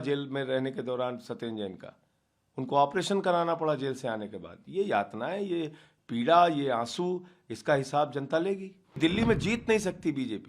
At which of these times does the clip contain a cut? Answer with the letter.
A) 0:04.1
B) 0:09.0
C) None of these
B